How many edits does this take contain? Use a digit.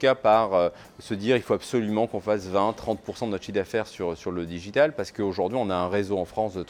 0